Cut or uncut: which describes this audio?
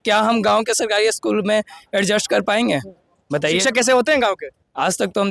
uncut